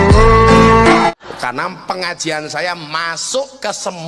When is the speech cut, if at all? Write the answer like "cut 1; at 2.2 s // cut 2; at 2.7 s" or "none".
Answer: cut 1; at 1.1 s